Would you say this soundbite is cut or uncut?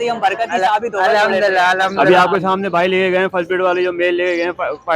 cut